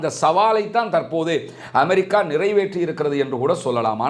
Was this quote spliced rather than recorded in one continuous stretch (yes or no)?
no